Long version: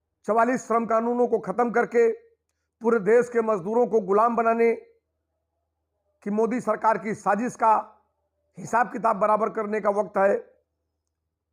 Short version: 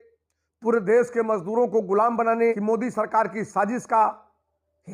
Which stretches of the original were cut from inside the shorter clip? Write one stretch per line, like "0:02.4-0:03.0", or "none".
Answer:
0:04.8-0:06.3